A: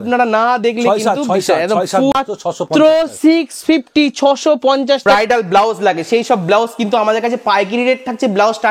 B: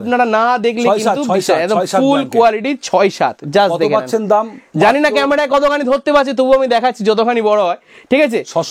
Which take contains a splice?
A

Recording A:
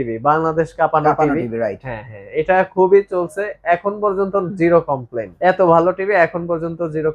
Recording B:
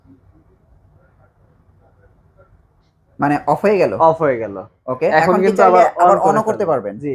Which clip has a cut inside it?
A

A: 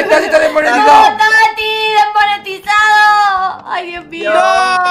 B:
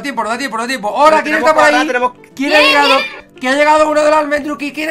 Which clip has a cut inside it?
B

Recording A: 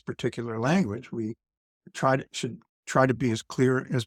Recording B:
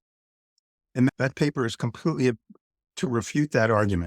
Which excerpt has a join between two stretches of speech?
B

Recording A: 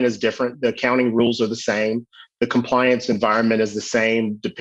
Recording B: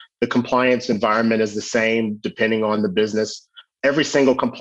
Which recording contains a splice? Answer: B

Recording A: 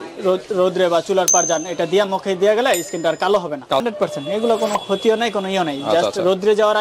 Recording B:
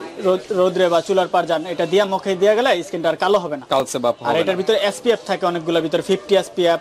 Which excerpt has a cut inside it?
A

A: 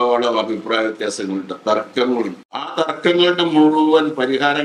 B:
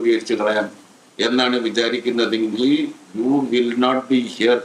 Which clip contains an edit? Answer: A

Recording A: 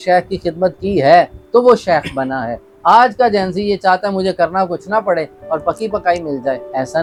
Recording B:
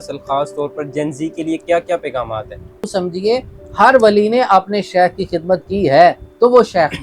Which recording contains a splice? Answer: B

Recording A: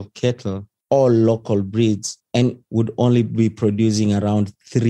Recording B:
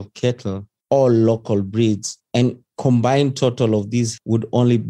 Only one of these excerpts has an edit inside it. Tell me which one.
A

